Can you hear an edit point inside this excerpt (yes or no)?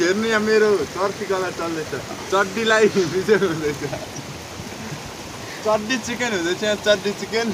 no